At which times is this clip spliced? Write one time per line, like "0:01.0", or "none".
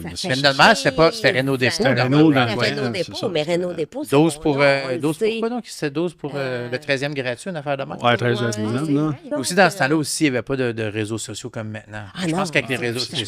0:09.3